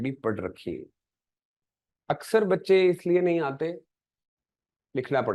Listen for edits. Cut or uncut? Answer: cut